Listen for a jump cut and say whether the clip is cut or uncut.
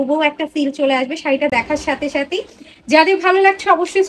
uncut